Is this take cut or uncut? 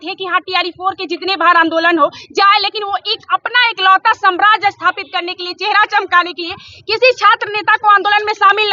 uncut